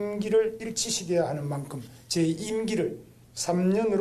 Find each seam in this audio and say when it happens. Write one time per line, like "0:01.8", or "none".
none